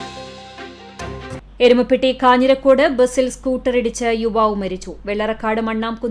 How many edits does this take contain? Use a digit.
1